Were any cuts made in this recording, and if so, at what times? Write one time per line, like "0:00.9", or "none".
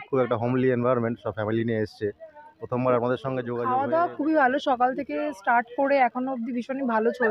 0:03.5